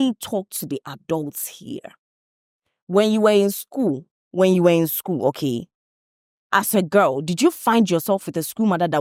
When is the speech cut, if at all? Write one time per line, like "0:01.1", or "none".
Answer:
none